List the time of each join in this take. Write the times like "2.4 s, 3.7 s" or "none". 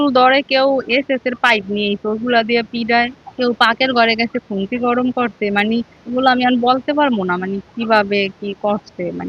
none